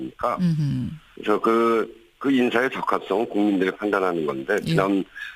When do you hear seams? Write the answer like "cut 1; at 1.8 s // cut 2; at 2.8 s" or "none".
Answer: cut 1; at 1.1 s